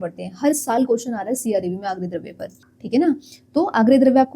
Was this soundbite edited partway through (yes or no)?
yes